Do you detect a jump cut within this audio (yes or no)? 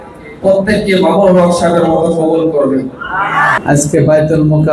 yes